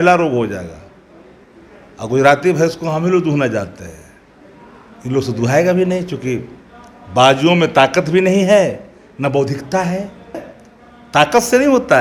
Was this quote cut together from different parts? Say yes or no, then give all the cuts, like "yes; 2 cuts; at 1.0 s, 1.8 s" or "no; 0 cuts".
no; 0 cuts